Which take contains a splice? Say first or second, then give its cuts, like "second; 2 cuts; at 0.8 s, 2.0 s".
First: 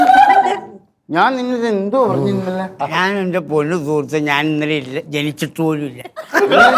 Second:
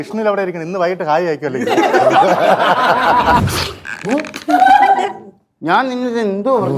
second; 1 cut; at 3.4 s